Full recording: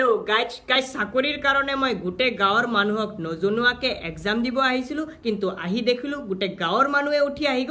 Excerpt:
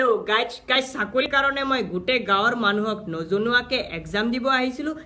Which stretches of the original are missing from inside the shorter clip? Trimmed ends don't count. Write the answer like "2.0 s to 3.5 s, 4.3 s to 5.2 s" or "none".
1.3 s to 1.4 s